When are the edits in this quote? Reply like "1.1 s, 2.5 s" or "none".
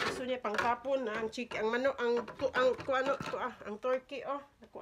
none